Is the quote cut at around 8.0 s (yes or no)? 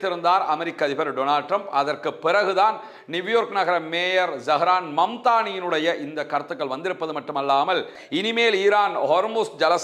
yes